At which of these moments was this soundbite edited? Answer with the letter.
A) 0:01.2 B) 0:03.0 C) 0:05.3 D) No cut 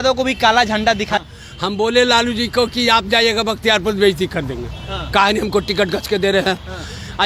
A